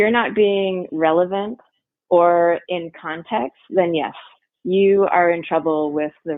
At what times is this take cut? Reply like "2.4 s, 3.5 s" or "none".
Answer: none